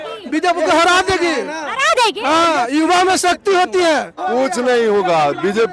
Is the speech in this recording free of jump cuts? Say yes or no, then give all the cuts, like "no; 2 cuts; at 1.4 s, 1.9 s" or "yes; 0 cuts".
no; 1 cut; at 4.2 s